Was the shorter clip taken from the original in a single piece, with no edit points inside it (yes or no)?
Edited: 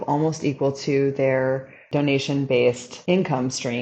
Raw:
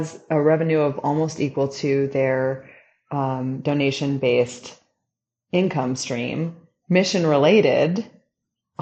no